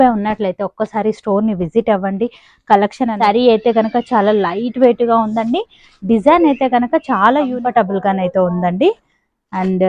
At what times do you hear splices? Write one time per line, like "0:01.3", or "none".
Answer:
0:03.2
0:07.5